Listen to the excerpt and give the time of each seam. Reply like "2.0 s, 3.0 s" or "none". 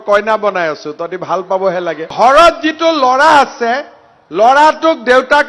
2.1 s